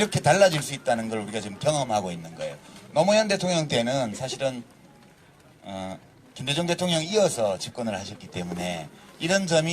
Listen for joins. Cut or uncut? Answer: uncut